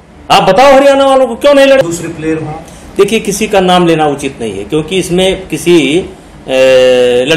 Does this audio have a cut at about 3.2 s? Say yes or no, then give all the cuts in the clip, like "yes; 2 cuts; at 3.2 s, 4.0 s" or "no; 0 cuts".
no; 1 cut; at 1.8 s